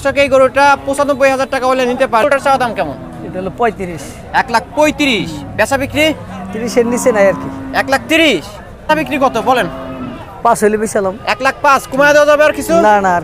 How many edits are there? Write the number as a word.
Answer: two